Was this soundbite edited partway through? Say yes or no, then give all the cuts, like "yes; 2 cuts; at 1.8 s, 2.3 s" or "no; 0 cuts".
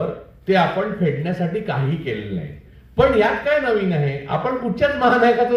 no; 0 cuts